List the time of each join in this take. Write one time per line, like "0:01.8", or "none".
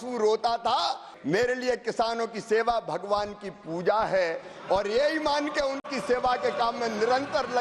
0:01.1